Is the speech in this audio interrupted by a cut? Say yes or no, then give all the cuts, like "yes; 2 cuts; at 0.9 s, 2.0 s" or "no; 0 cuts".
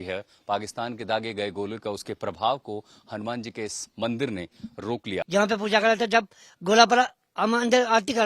yes; 1 cut; at 5.1 s